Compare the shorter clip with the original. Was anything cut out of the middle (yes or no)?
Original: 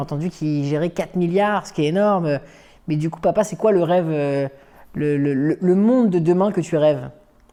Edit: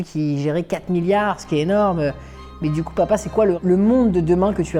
yes